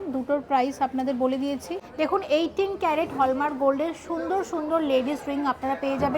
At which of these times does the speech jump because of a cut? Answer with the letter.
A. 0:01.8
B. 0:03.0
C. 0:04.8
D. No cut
A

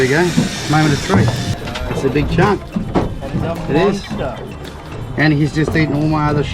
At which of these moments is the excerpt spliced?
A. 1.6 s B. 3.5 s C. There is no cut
A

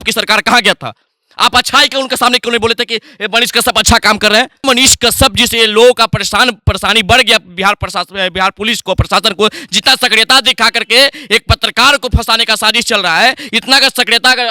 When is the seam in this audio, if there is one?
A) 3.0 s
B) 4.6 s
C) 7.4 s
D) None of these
B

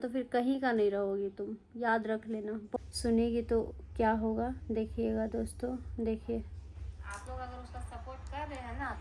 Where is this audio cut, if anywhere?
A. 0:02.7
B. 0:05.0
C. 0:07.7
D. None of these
A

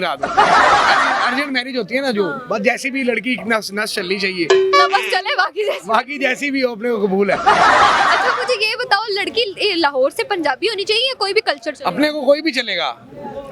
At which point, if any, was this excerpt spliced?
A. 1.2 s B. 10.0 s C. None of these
A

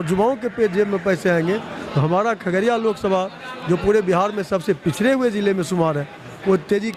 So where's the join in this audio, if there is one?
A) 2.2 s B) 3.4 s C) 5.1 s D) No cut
D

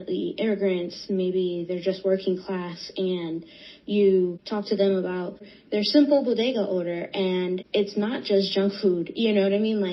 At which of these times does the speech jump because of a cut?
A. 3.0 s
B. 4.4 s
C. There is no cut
B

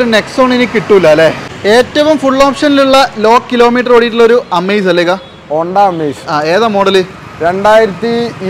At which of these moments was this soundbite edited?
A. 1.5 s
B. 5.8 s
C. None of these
A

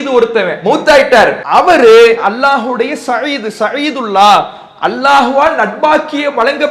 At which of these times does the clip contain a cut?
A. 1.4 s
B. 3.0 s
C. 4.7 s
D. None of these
A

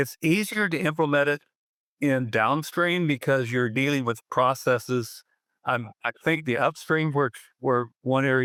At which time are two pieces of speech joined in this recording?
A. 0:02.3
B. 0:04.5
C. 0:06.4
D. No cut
D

